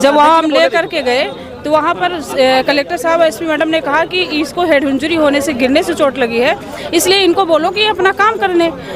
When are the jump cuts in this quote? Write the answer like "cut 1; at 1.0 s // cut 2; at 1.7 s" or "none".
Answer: none